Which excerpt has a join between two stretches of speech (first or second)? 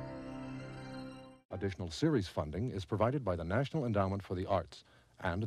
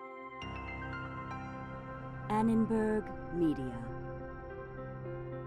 first